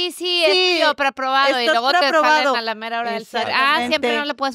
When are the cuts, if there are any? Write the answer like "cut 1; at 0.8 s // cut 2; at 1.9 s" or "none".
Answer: none